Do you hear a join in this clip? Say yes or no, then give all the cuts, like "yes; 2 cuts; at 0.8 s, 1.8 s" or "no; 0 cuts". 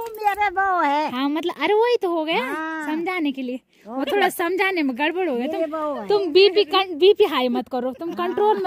no; 0 cuts